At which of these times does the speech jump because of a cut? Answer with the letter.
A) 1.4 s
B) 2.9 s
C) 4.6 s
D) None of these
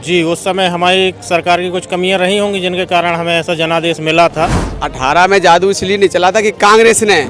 C